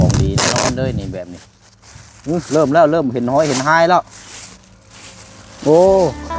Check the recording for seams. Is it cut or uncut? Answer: uncut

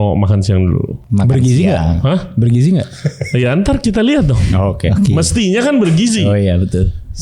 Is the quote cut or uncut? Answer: cut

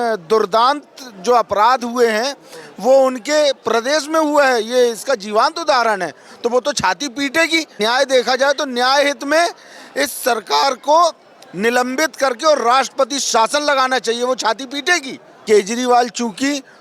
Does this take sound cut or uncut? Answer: cut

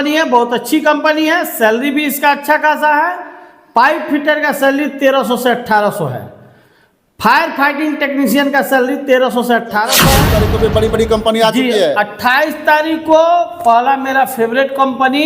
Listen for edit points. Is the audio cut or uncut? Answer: cut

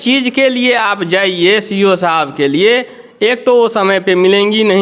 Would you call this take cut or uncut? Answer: uncut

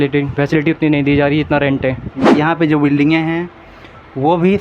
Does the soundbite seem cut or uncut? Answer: cut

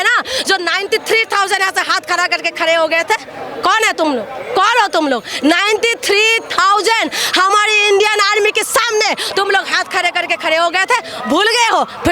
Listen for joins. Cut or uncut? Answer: uncut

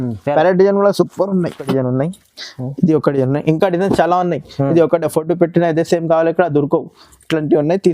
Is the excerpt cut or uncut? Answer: cut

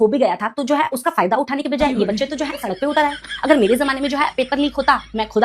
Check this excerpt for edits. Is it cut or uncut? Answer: uncut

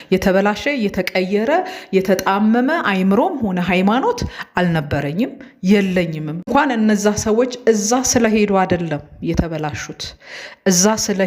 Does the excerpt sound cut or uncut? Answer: cut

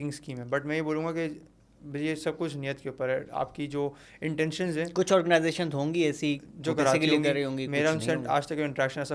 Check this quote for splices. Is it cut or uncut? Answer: uncut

